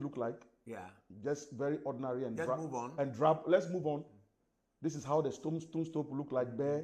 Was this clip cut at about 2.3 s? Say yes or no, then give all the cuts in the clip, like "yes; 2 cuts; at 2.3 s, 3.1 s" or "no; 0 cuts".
no; 0 cuts